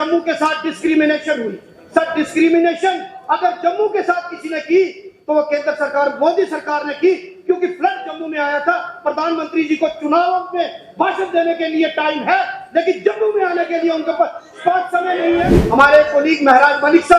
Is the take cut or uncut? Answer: cut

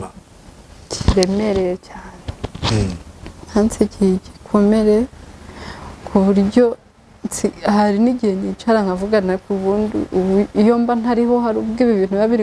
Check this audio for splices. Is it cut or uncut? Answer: uncut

